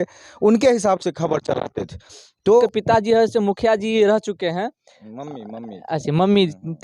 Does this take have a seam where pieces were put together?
yes; 1 cut; at 2.6 s

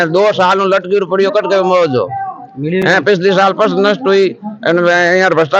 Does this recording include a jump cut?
no; 0 cuts

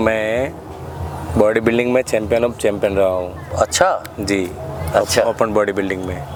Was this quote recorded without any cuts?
yes; 0 cuts

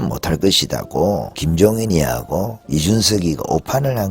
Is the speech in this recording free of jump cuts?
no; 2 cuts; at 1.4 s, 2.6 s

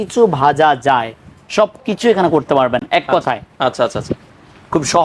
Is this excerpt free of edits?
yes; 0 cuts

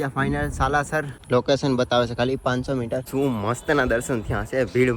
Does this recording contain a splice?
yes; 2 cuts; at 1.3 s, 3.0 s

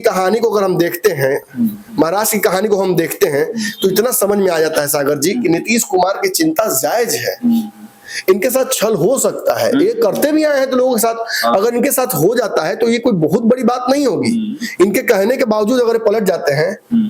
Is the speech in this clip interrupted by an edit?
no; 0 cuts

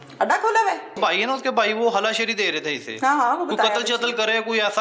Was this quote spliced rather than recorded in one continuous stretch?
yes; 1 cut; at 0.9 s

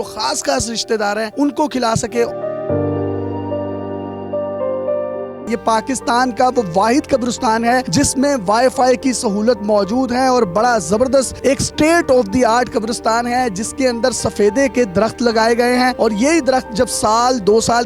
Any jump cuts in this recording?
yes; 1 cut; at 5.5 s

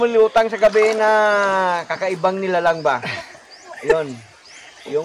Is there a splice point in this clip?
no; 0 cuts

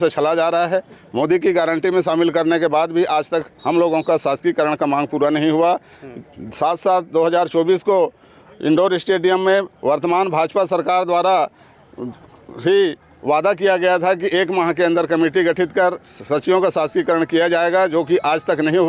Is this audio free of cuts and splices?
yes; 0 cuts

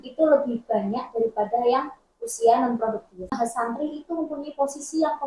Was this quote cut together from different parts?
yes; 1 cut; at 3.3 s

